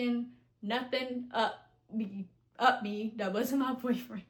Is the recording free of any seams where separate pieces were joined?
yes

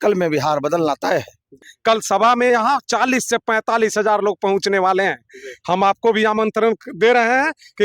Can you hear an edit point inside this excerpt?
yes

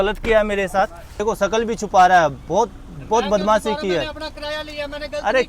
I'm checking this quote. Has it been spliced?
yes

